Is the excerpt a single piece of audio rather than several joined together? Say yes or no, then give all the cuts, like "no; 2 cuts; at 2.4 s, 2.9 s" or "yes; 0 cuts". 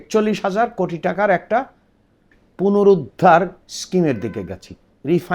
yes; 0 cuts